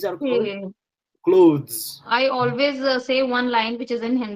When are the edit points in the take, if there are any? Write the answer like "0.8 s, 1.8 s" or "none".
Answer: 2.0 s